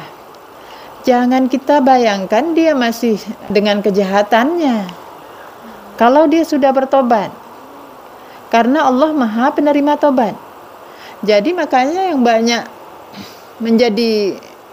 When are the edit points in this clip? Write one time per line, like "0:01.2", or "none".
0:03.5